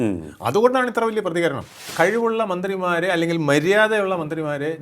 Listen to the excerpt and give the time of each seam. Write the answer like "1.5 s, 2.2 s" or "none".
1.8 s